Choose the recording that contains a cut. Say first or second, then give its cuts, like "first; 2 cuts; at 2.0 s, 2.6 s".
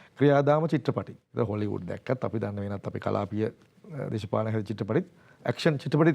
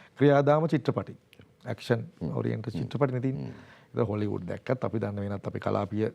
first; 1 cut; at 1.2 s